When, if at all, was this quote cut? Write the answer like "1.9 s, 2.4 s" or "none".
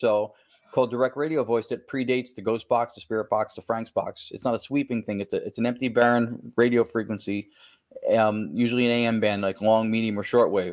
none

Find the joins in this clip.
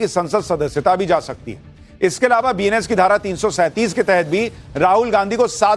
4.4 s

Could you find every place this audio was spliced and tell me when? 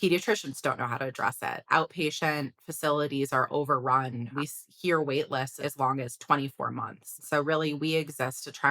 4.3 s, 5.5 s, 7.1 s

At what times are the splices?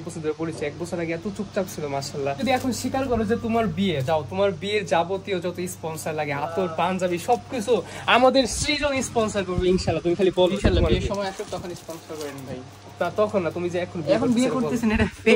2.4 s

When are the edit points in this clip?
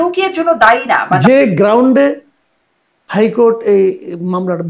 1.2 s

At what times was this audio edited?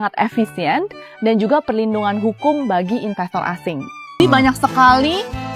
4.2 s

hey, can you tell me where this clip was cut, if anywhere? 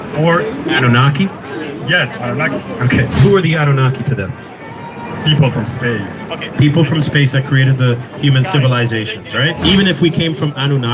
3.2 s, 9.6 s

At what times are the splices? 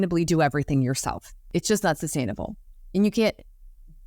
1.3 s

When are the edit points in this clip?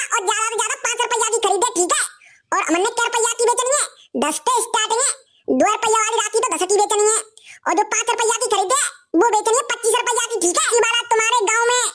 10.6 s

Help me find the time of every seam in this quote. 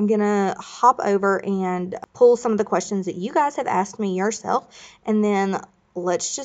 2.0 s

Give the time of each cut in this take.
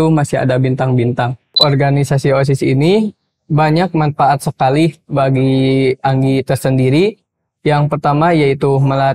1.5 s

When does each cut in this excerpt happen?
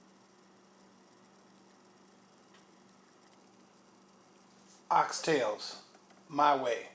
1.2 s

